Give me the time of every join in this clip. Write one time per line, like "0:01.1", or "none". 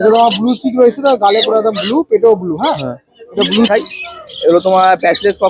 0:03.7